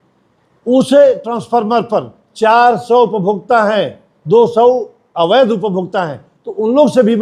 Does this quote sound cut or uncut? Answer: uncut